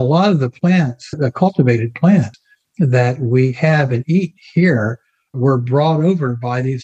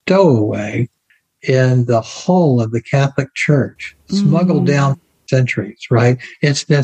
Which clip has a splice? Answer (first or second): first